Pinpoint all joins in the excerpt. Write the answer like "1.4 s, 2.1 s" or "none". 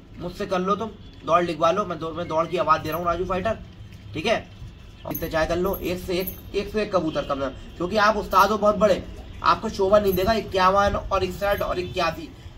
5.1 s